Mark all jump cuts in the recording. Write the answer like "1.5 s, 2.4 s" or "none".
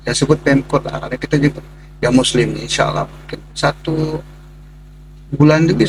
none